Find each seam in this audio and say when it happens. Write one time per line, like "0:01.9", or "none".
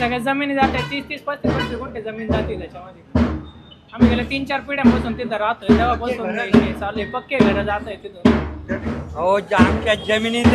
0:09.0